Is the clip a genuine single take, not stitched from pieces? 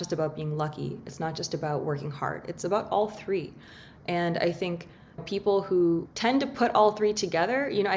no; 1 cut; at 6.1 s

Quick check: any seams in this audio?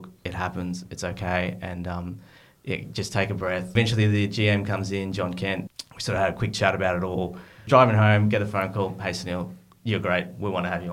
yes; 3 cuts; at 3.7 s, 5.7 s, 7.6 s

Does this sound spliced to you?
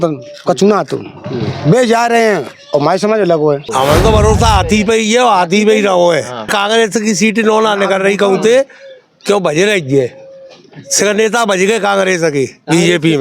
yes; 2 cuts; at 3.6 s, 6.5 s

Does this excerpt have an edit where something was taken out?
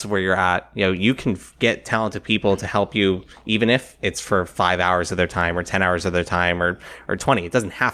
no; 0 cuts

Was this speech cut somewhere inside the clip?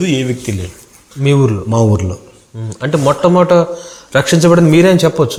no; 0 cuts

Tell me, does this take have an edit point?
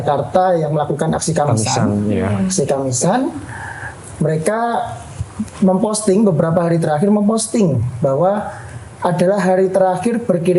no; 0 cuts

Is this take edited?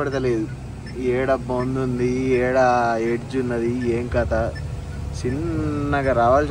no; 0 cuts

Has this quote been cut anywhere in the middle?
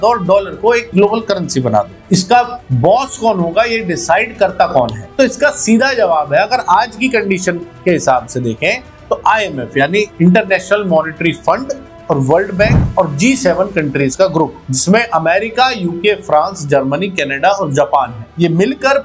no; 0 cuts

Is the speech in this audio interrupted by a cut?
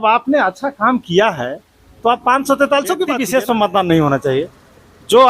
yes; 1 cut; at 3.2 s

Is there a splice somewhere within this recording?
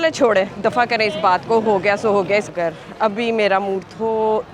yes; 1 cut; at 2.5 s

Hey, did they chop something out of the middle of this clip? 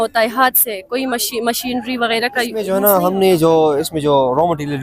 yes; 1 cut; at 2.7 s

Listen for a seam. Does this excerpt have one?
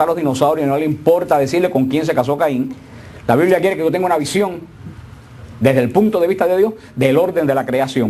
yes; 1 cut; at 2.4 s

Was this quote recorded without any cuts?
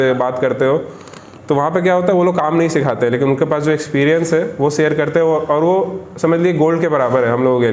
yes; 0 cuts

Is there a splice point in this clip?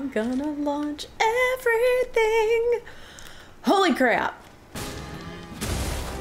yes; 1 cut; at 4.7 s

